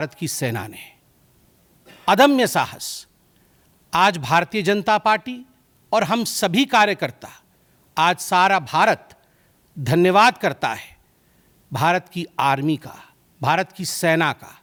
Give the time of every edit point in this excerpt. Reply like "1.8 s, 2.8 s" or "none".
none

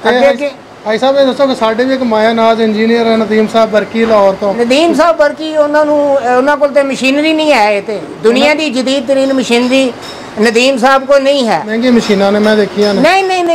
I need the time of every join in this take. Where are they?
11.7 s

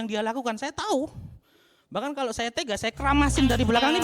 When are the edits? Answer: none

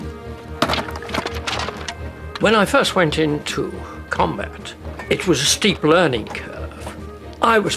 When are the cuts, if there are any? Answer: 4.3 s

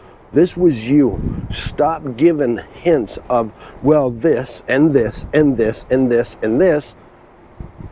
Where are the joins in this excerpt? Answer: none

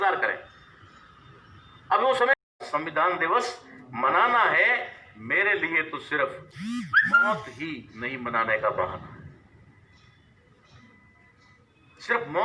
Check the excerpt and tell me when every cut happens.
2.5 s

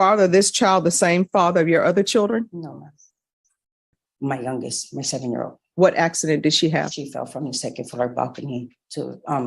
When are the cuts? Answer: 4.0 s

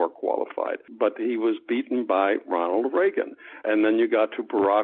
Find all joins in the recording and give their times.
0.9 s, 3.6 s

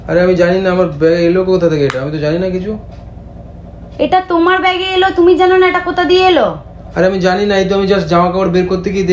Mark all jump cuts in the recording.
none

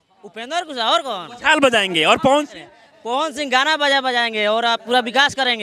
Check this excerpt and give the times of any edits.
none

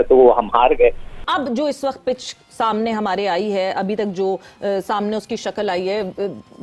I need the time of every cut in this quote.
1.1 s

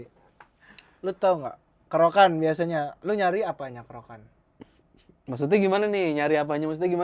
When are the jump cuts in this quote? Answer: none

